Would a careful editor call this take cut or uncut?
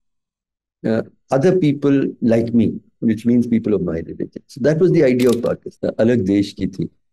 cut